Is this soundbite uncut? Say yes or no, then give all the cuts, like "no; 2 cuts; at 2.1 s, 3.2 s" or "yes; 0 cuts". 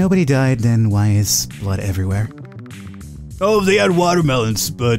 yes; 0 cuts